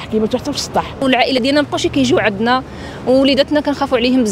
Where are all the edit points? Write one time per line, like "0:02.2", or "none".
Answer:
0:01.0